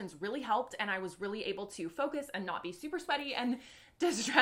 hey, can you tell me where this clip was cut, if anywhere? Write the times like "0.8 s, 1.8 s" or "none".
none

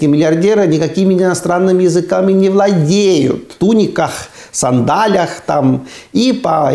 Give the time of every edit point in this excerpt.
3.5 s

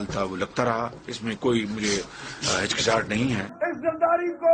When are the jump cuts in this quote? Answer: 3.5 s

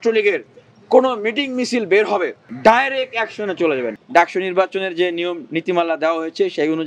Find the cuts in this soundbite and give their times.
2.4 s, 3.9 s

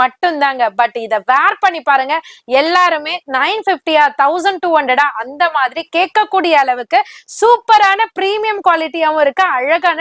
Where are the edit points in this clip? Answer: none

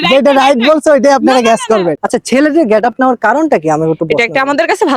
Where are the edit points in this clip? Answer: 2.0 s

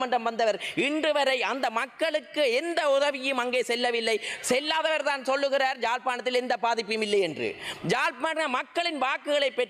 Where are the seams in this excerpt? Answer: none

